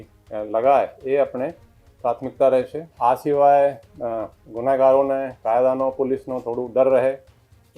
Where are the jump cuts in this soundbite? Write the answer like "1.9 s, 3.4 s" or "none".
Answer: 2.8 s